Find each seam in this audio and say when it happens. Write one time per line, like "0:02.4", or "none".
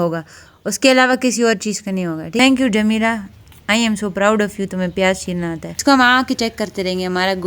0:02.4
0:05.7

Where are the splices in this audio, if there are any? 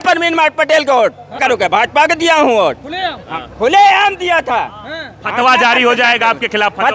0:01.4

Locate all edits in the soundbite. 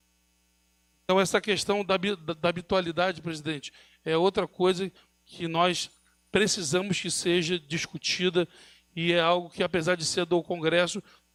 none

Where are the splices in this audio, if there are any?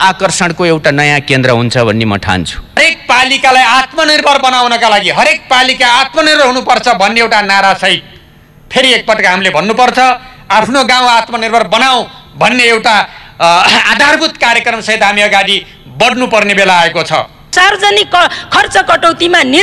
0:02.8
0:17.5

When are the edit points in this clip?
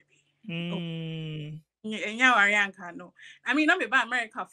none

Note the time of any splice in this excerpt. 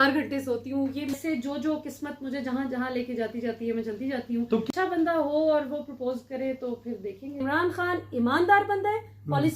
0:01.2
0:04.7
0:07.4

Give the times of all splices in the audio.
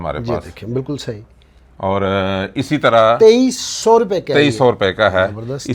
none

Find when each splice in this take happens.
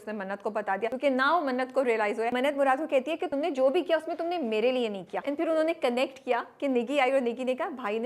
0:00.9
0:02.3
0:03.3
0:05.1

